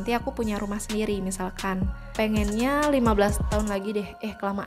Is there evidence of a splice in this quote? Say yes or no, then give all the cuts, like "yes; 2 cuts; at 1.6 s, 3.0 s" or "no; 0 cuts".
yes; 1 cut; at 2.1 s